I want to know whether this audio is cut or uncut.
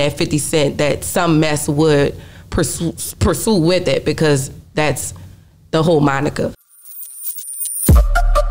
cut